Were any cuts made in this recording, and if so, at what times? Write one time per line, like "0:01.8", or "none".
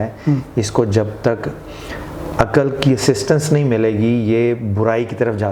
none